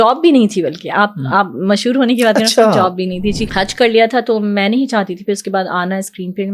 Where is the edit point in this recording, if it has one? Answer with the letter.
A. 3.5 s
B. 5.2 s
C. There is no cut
A